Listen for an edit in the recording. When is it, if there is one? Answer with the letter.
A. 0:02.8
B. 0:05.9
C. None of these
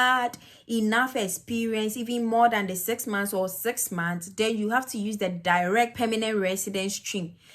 B